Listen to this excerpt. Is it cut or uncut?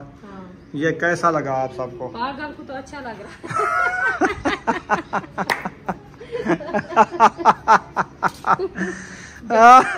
uncut